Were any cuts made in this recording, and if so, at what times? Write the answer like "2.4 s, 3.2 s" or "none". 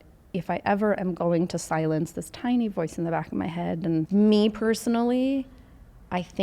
4.1 s